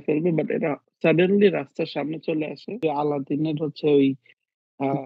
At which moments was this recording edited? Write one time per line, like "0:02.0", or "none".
0:02.8